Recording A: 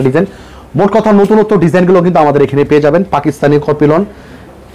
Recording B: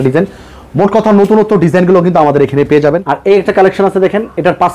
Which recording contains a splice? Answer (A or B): B